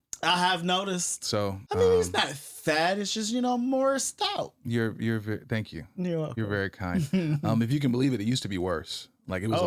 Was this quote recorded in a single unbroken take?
no; 1 cut; at 1.6 s

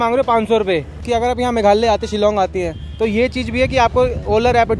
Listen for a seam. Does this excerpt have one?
yes; 1 cut; at 0.9 s

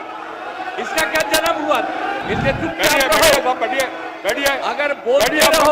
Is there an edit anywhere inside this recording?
yes; 1 cut; at 2.2 s

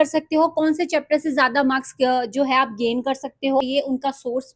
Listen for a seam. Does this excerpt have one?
yes; 1 cut; at 3.6 s

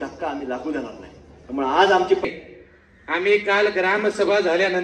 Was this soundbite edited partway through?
yes; 1 cut; at 2.3 s

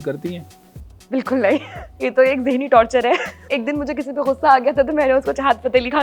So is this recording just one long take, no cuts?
no; 2 cuts; at 1.9 s, 3.5 s

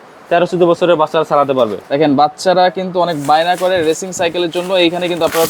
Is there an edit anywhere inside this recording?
yes; 1 cut; at 1.8 s

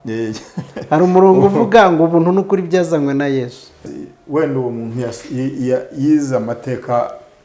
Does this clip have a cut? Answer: yes; 1 cut; at 3.8 s

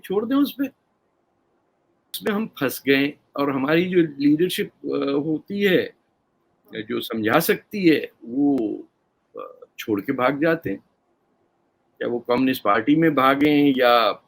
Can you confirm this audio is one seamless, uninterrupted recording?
no; 1 cut; at 2.2 s

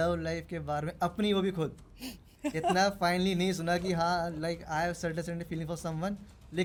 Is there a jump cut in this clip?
no; 0 cuts

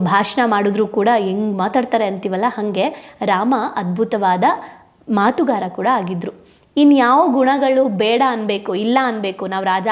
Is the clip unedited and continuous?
yes; 0 cuts

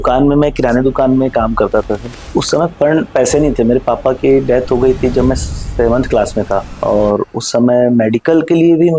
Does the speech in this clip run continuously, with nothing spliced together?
yes; 0 cuts

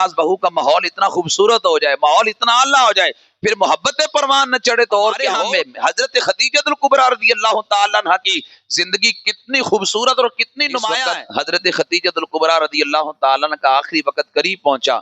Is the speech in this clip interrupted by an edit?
yes; 2 cuts; at 5.4 s, 11.0 s

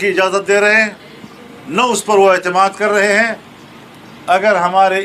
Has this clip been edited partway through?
no; 0 cuts

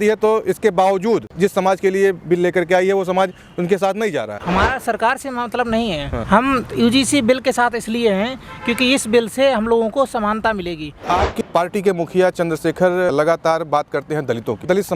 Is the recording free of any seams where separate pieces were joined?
no; 3 cuts; at 1.3 s, 4.4 s, 10.9 s

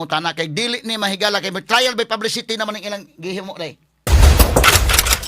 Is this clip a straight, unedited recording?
no; 1 cut; at 4.1 s

